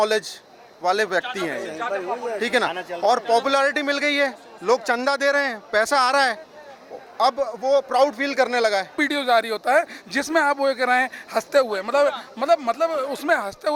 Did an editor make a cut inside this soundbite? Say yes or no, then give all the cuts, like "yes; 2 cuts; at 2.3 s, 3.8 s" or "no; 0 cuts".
yes; 1 cut; at 9.0 s